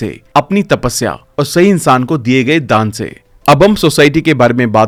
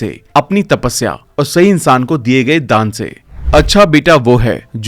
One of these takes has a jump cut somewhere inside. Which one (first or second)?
second